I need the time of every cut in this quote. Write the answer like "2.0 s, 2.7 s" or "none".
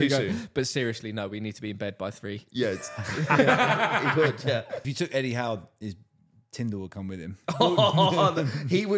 4.9 s